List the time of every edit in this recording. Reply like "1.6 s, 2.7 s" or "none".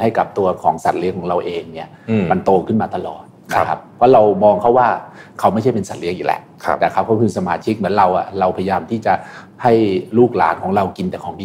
none

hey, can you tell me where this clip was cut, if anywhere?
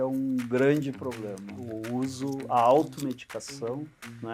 1.5 s

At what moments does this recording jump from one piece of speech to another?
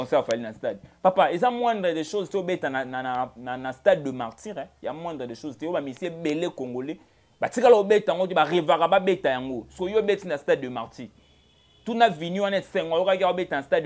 none

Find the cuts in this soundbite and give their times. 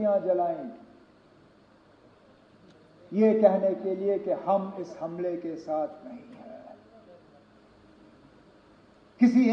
7.6 s

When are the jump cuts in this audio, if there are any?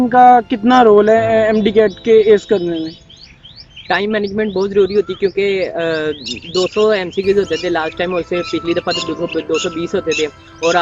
none

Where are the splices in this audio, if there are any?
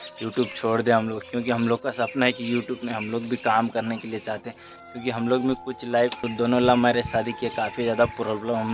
6.3 s

